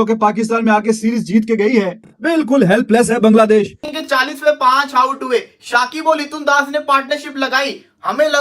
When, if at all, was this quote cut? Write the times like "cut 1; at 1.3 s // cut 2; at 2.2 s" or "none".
cut 1; at 3.9 s

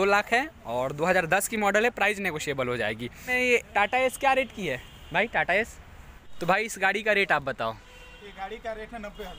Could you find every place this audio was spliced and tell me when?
cut 1; at 3.3 s // cut 2; at 6.3 s

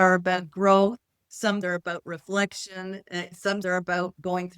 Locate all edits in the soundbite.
cut 1; at 1.6 s // cut 2; at 3.6 s

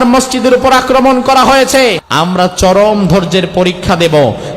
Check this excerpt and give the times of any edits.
cut 1; at 2.0 s

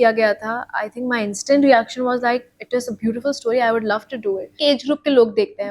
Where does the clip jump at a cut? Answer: cut 1; at 4.6 s

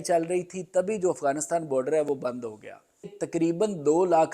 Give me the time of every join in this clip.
cut 1; at 3.2 s

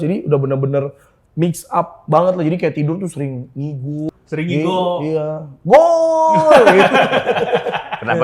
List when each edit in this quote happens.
cut 1; at 4.1 s

